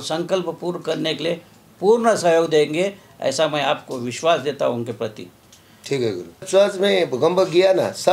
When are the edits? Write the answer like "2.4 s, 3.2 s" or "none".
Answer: 6.4 s